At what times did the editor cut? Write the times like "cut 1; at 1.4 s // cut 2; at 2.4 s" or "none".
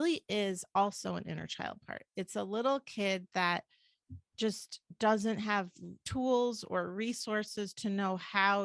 none